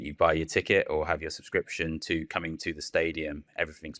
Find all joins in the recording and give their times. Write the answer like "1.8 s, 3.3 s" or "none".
none